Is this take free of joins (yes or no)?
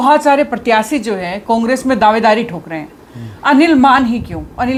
yes